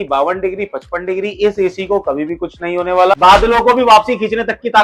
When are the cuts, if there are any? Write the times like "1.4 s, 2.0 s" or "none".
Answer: 3.1 s